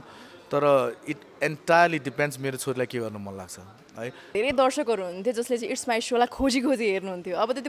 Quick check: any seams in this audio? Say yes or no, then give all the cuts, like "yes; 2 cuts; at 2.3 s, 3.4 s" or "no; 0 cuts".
yes; 1 cut; at 4.3 s